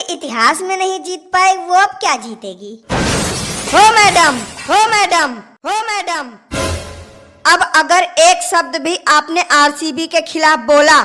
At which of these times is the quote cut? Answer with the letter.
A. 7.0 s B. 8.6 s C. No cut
C